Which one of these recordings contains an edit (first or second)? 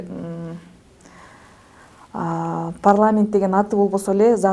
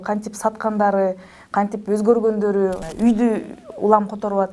second